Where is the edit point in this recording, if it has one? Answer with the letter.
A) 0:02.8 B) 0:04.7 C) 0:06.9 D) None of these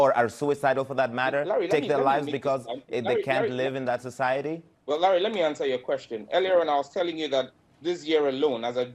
B